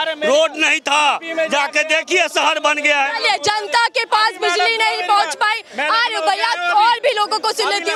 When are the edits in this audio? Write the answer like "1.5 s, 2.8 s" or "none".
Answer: none